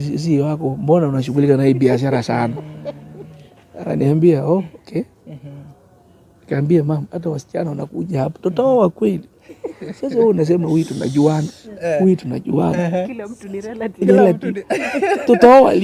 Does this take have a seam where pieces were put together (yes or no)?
no